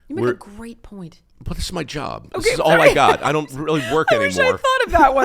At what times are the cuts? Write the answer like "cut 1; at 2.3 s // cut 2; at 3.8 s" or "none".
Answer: none

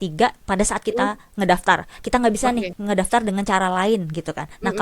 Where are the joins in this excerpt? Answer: cut 1; at 2.7 s

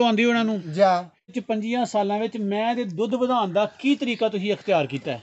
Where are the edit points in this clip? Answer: cut 1; at 1.4 s

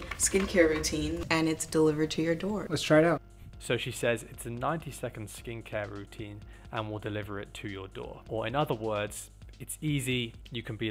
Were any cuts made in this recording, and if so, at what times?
none

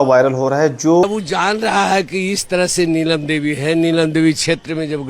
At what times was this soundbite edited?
cut 1; at 1.0 s

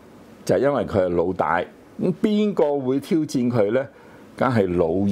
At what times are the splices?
cut 1; at 1.9 s

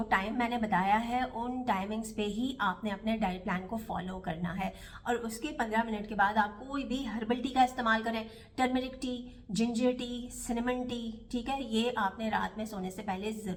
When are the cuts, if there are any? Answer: none

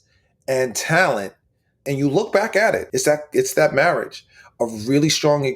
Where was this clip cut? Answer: cut 1; at 1.8 s // cut 2; at 2.9 s

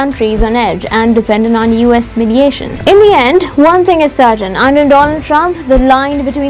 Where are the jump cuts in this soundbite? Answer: cut 1; at 2.7 s

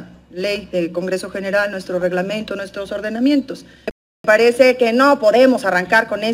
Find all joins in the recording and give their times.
cut 1; at 4.2 s

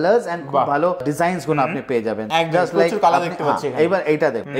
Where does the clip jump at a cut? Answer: none

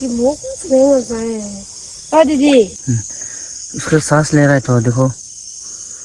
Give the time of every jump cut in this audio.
cut 1; at 2.8 s

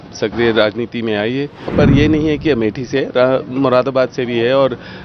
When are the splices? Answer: cut 1; at 1.7 s

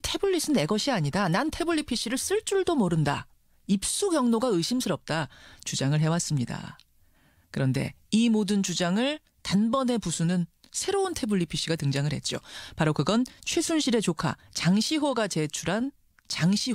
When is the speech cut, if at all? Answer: cut 1; at 12.5 s

